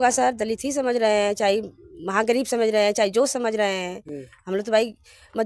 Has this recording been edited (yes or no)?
no